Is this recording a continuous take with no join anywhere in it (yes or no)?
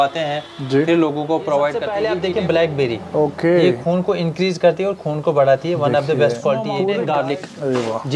no